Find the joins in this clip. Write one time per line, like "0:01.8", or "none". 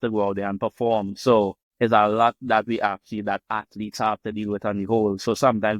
0:01.6